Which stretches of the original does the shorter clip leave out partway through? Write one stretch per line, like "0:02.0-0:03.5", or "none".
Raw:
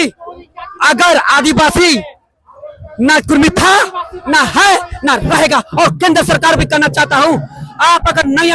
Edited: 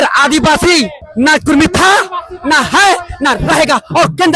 0:02.1-0:02.8